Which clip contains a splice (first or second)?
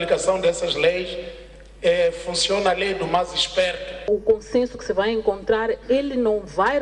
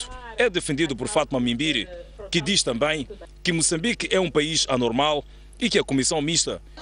first